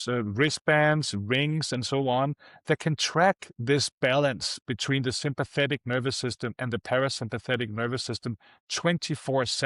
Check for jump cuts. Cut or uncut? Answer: uncut